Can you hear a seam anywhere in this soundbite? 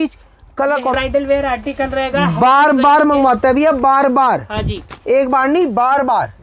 yes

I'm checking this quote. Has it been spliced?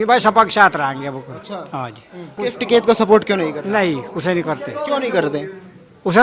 yes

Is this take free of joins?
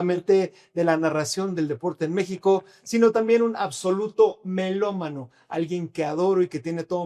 yes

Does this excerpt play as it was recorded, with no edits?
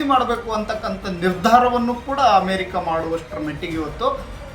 yes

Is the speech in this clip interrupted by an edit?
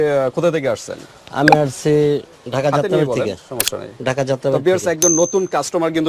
no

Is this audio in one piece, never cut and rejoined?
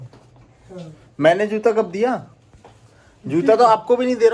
yes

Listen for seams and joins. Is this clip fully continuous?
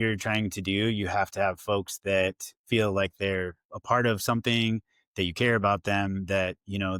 yes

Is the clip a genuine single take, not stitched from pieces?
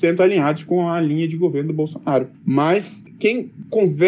yes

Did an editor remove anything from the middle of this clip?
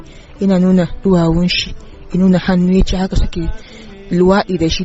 no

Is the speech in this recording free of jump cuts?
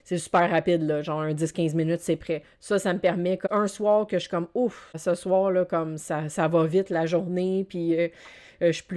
no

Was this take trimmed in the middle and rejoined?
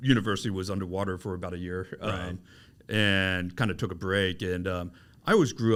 no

